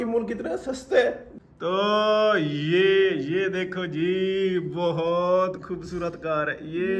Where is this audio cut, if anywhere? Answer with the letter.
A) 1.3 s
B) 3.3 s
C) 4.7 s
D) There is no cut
A